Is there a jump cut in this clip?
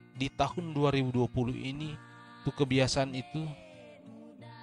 no; 0 cuts

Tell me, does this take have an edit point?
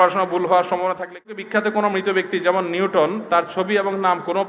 yes; 1 cut; at 1.3 s

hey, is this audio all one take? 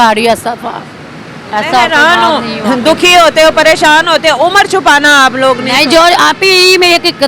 yes; 0 cuts

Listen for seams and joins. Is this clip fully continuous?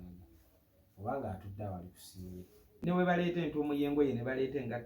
no; 1 cut; at 2.8 s

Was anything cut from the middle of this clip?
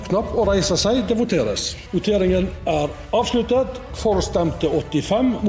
yes; 1 cut; at 1.7 s

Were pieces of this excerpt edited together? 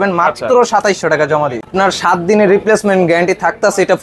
yes; 1 cut; at 1.7 s

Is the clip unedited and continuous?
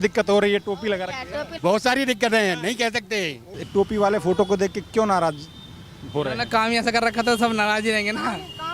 no; 2 cuts; at 1.5 s, 3.5 s

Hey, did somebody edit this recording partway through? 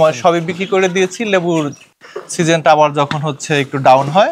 no; 0 cuts

